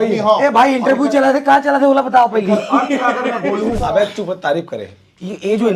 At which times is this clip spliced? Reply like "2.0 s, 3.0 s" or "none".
3.8 s